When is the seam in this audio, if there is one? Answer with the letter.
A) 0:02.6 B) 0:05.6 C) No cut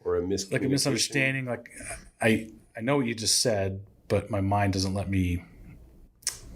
C